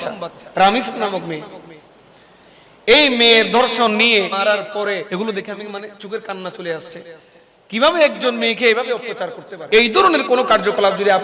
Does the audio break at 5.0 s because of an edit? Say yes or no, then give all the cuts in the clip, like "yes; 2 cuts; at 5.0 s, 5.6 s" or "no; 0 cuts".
yes; 2 cuts; at 5.0 s, 9.7 s